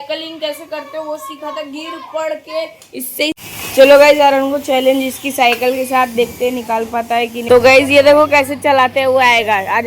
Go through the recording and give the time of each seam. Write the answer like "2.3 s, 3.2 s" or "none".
3.3 s, 7.4 s

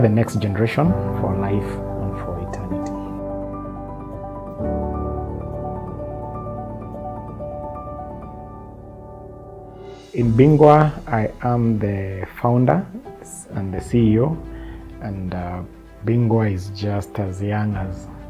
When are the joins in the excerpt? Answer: 15.8 s, 16.7 s

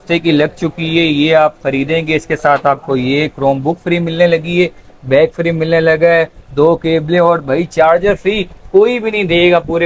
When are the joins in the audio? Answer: none

